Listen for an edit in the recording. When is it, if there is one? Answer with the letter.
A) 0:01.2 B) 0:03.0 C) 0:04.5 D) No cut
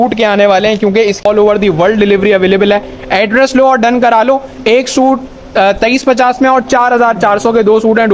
A